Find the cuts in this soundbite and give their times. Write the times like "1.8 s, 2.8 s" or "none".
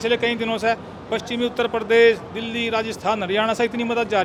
none